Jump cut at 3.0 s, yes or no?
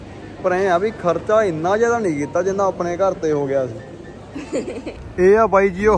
no